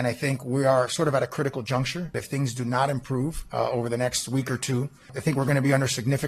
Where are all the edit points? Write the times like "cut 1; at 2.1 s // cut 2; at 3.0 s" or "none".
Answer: cut 1; at 2.1 s // cut 2; at 3.4 s // cut 3; at 5.2 s